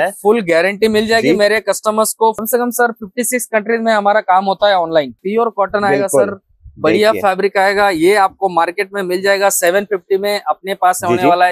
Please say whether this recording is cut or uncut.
cut